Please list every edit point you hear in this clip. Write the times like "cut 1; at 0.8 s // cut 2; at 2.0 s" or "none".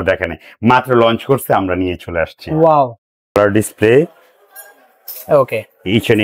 cut 1; at 3.3 s